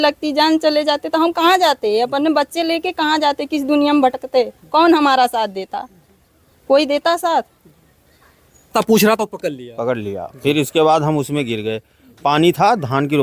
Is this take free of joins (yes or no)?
no